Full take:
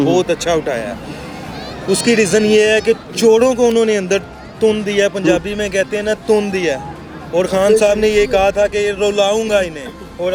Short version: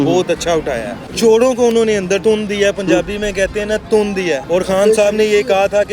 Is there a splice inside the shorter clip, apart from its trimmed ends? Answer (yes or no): yes